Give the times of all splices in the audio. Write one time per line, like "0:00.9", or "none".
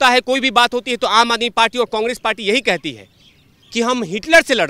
none